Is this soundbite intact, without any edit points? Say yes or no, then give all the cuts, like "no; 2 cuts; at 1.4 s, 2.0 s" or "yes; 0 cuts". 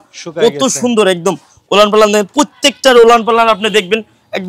yes; 0 cuts